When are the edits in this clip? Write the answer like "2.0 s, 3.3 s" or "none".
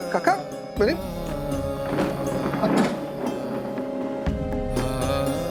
none

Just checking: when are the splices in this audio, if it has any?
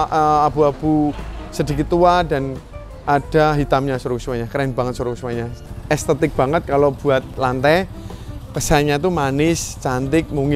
5.5 s, 7.4 s

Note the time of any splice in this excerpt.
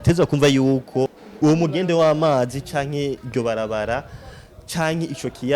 1.2 s

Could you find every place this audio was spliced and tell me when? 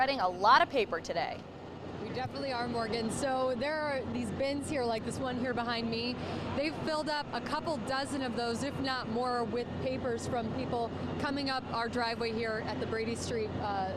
none

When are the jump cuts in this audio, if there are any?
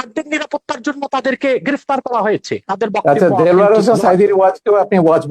2.6 s

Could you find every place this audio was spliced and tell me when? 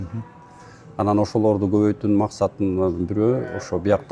none

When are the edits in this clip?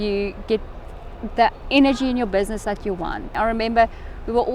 3.3 s

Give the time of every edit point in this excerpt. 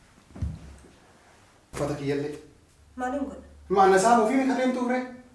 1.7 s

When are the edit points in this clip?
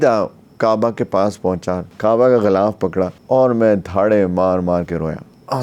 1.8 s, 3.2 s

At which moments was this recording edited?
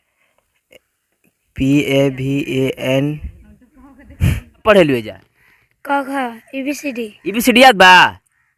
4.6 s

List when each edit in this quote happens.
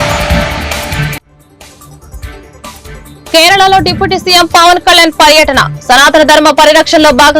3.3 s

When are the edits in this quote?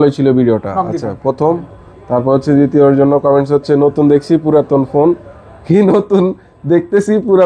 none

